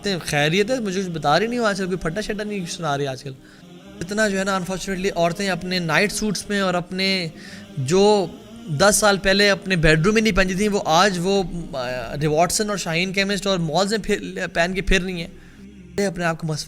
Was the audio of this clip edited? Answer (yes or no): yes